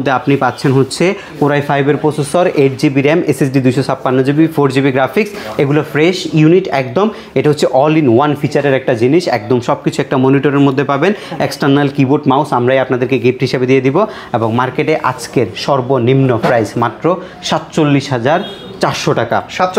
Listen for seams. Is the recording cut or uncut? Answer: uncut